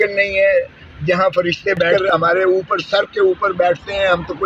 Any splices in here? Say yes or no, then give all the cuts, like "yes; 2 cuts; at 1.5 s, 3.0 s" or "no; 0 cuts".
yes; 1 cut; at 1.9 s